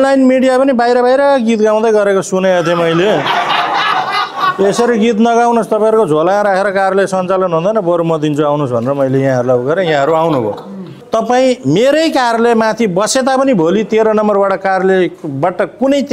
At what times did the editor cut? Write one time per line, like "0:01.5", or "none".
0:11.0